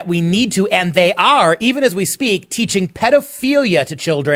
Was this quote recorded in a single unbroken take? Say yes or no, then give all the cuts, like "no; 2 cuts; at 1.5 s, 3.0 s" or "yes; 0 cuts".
yes; 0 cuts